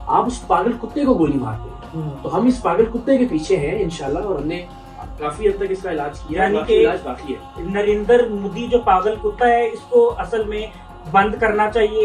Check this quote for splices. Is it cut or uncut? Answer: uncut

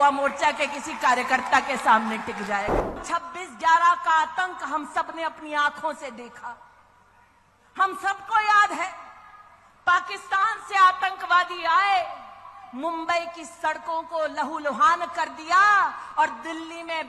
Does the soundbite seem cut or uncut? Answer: cut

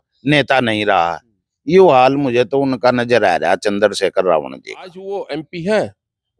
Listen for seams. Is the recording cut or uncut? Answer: cut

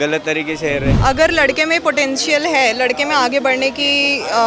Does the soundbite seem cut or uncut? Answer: cut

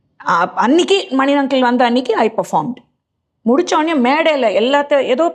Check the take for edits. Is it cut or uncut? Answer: uncut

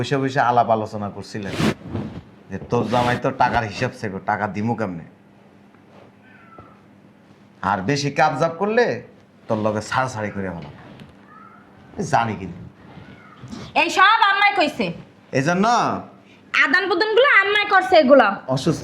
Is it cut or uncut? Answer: uncut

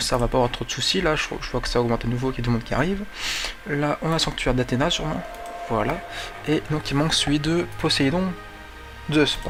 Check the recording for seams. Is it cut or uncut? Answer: uncut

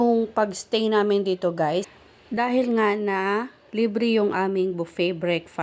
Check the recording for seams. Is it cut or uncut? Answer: uncut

